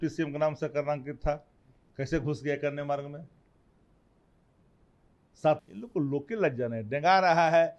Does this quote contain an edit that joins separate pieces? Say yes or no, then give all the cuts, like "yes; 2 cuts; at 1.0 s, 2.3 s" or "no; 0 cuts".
yes; 1 cut; at 5.6 s